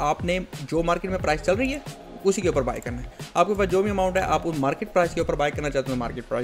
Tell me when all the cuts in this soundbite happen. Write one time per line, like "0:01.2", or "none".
none